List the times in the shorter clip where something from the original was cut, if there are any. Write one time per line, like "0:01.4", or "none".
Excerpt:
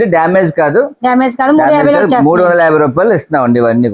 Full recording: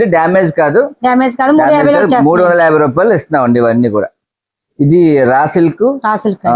none